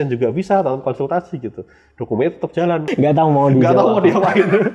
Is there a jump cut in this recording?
yes; 1 cut; at 2.9 s

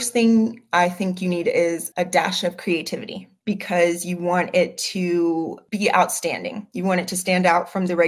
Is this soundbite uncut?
yes; 0 cuts

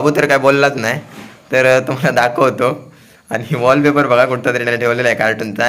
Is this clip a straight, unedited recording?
yes; 0 cuts

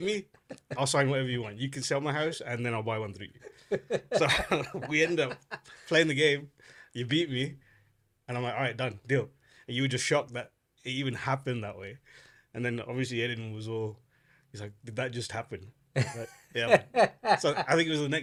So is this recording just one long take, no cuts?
yes; 0 cuts

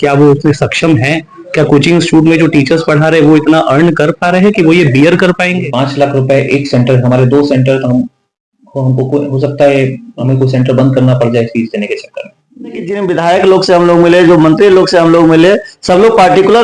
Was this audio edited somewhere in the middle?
yes; 2 cuts; at 5.6 s, 12.9 s

